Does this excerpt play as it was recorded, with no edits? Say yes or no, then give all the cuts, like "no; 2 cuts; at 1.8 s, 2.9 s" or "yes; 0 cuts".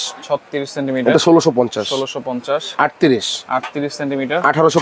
yes; 0 cuts